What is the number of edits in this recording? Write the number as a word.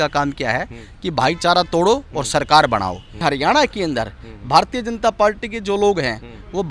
one